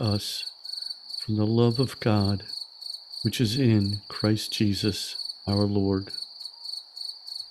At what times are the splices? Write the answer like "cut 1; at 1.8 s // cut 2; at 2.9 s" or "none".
cut 1; at 6.2 s